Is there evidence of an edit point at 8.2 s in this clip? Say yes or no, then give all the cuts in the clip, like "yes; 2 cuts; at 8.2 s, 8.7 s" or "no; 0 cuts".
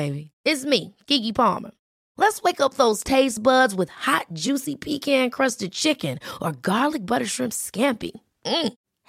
no; 0 cuts